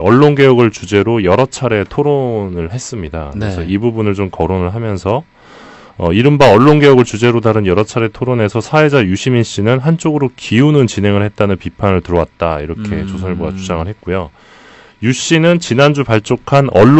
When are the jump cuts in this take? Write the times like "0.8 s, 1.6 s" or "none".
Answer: 15.0 s